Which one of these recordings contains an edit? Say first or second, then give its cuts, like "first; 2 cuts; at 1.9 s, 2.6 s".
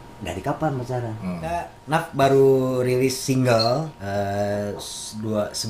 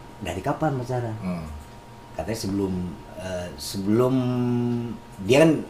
first; 2 cuts; at 1.7 s, 4.0 s